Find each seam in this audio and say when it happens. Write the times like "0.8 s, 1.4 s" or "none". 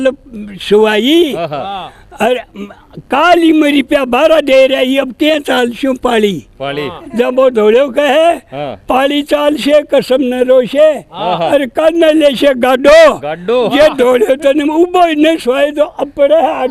none